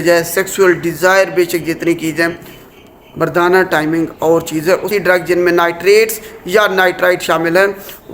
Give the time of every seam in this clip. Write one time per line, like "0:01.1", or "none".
0:04.9